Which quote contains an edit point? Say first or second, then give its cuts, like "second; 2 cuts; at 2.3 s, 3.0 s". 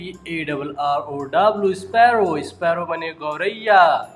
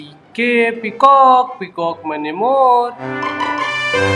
second; 1 cut; at 3.1 s